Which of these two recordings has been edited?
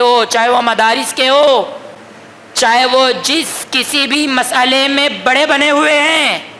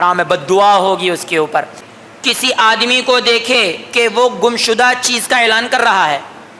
second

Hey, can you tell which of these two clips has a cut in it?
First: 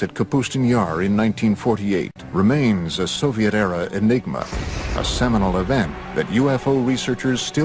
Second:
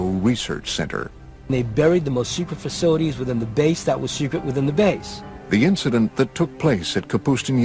second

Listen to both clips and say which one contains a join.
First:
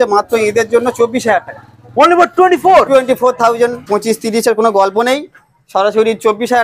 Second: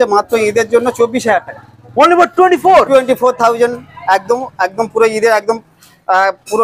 first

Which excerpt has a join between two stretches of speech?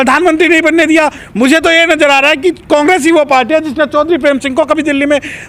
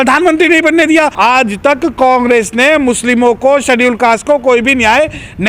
second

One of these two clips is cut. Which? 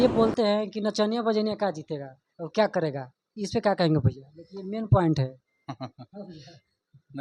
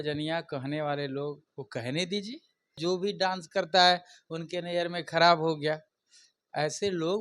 second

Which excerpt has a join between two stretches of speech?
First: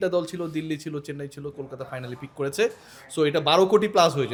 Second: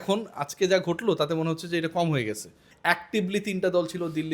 second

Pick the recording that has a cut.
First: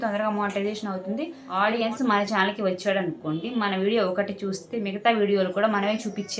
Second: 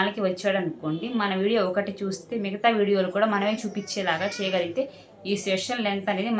first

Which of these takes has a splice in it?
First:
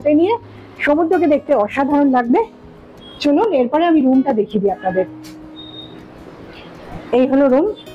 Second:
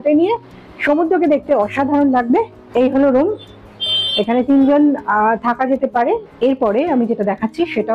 second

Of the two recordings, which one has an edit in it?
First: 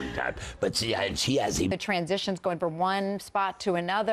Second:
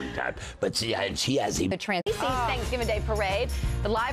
first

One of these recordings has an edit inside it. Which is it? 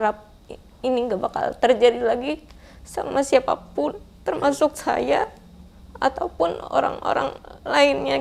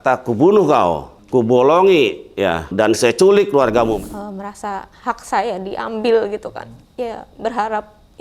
second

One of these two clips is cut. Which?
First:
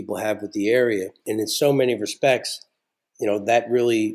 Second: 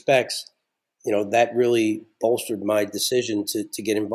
first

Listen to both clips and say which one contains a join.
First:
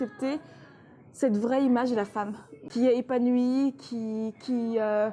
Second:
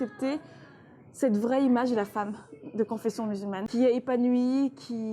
first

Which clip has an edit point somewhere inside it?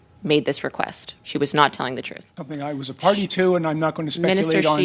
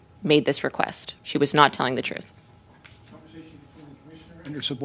first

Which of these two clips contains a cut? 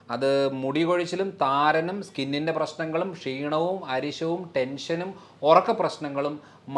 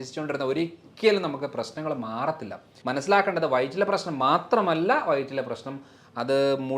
second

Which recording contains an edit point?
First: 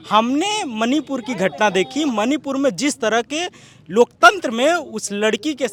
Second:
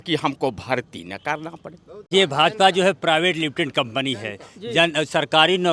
second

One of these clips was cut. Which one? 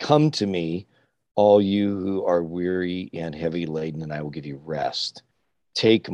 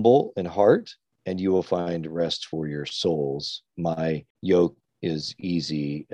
second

